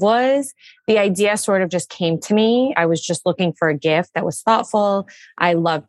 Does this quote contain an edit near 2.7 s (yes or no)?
yes